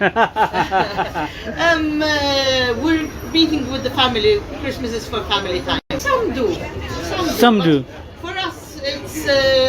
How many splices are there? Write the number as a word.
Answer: zero